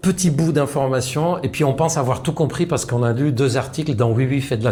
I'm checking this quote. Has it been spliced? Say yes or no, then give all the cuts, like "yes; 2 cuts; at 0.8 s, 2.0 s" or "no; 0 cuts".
no; 0 cuts